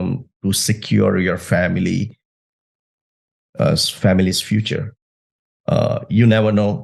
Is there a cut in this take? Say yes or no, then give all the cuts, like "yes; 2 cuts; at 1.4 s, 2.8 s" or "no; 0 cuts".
no; 0 cuts